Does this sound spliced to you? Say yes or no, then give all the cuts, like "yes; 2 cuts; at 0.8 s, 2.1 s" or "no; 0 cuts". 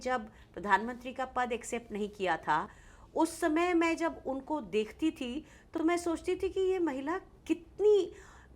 no; 0 cuts